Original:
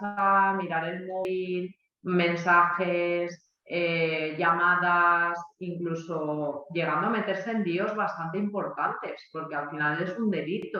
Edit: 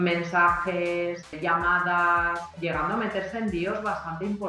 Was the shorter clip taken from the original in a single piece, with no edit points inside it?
no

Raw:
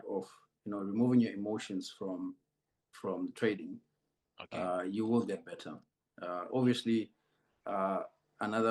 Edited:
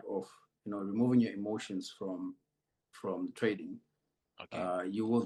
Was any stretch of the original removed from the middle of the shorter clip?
no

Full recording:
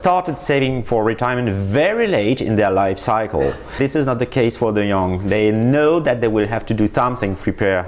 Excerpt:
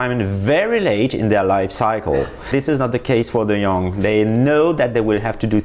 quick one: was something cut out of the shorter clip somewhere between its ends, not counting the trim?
no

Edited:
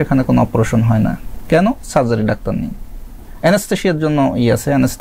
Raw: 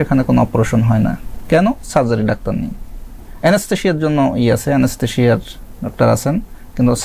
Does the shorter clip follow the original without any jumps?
yes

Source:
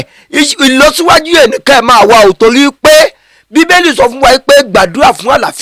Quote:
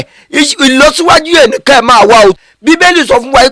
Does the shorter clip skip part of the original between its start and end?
yes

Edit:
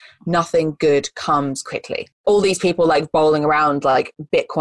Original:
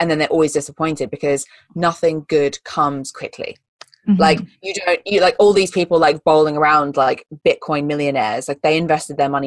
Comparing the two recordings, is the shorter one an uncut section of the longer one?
no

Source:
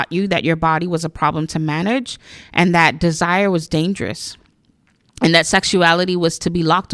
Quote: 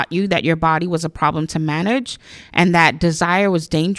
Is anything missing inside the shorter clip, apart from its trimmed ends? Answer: no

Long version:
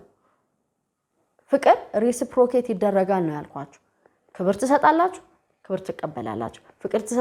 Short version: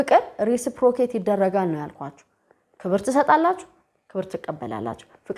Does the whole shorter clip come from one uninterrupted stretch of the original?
yes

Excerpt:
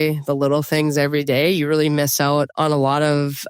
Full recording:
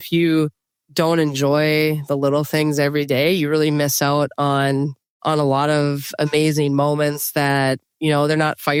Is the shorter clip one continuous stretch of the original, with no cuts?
no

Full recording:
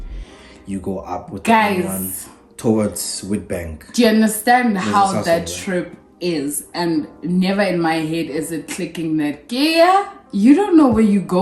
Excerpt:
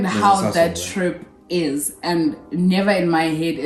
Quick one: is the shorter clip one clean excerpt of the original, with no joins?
yes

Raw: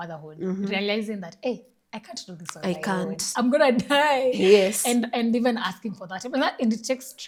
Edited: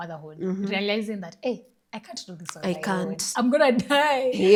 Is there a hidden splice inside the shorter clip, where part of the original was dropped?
no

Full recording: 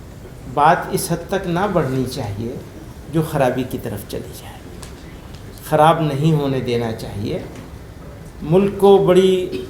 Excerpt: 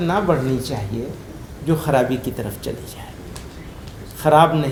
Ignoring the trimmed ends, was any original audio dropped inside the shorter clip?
no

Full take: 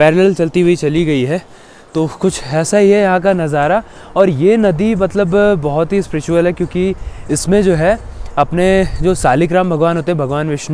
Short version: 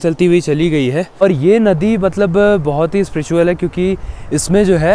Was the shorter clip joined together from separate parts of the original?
yes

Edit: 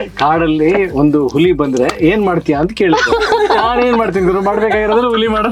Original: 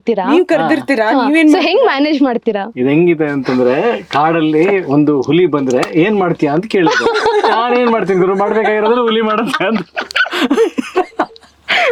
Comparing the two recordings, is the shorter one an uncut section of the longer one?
yes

